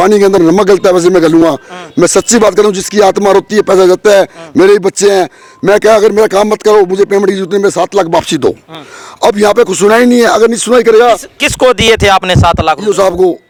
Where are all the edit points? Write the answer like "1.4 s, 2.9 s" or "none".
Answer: none

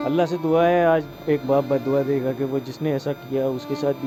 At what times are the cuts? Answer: none

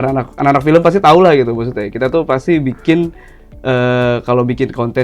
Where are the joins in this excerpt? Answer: none

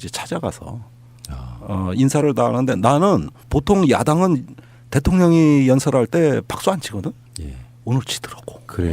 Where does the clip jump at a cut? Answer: 5.0 s

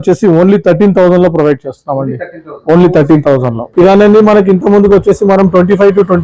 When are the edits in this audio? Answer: 3.6 s

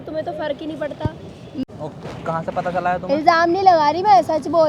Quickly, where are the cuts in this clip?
1.6 s

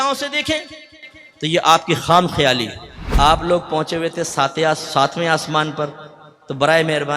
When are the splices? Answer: 3.0 s

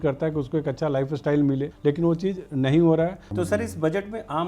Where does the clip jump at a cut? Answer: 1.7 s, 3.2 s

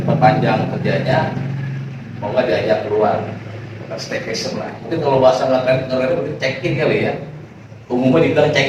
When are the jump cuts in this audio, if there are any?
none

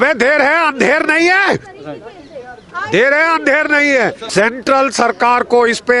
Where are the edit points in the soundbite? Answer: 4.2 s

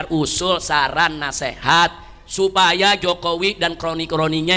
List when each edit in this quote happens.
none

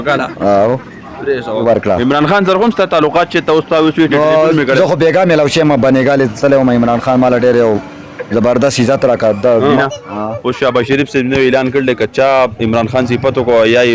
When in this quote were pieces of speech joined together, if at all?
1.6 s, 9.8 s

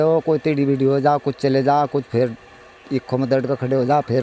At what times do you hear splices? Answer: none

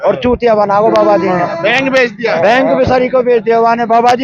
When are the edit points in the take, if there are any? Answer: none

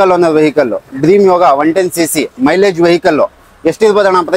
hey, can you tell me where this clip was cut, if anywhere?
none

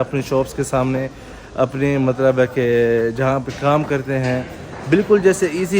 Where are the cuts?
none

